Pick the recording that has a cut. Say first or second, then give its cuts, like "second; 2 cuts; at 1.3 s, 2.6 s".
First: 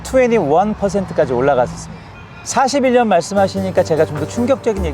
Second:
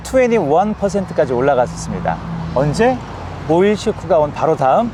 first; 1 cut; at 1.9 s